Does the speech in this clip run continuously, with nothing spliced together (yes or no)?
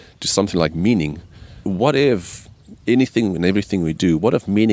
no